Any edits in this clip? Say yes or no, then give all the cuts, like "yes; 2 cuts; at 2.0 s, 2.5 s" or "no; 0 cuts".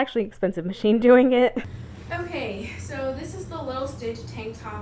yes; 1 cut; at 1.7 s